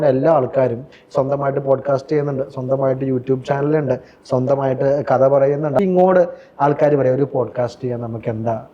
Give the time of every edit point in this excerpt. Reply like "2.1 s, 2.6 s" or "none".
5.8 s

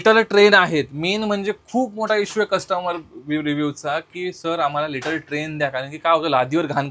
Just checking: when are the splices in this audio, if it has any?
none

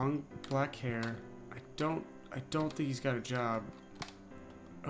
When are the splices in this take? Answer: none

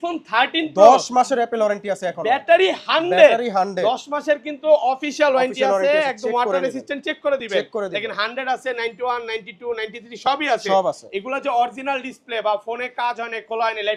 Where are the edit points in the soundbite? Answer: none

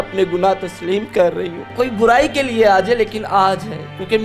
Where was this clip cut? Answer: 1.6 s

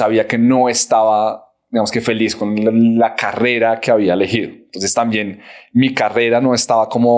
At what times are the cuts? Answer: none

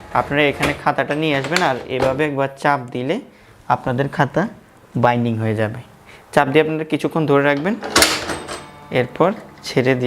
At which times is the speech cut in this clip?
none

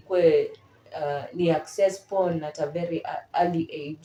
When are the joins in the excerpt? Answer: none

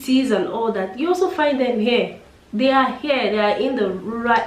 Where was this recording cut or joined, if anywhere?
none

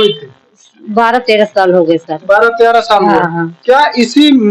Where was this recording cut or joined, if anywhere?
none

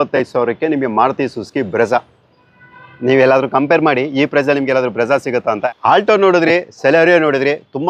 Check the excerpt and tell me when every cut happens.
5.6 s

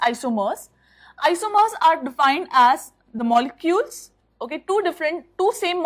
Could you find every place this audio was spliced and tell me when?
none

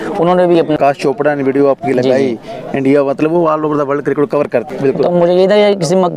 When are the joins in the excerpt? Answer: 0.8 s, 4.7 s

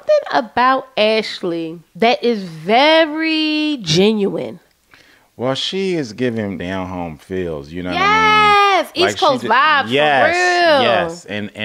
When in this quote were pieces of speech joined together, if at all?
1.8 s, 6.6 s

